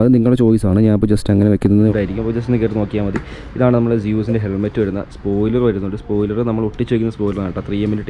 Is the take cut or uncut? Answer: cut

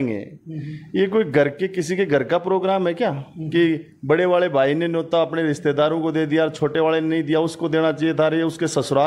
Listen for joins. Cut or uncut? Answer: uncut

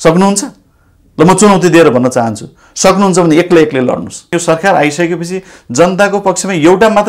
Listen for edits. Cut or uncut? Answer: cut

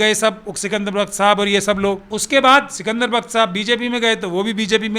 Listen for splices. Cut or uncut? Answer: cut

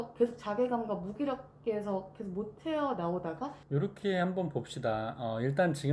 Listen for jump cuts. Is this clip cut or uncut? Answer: cut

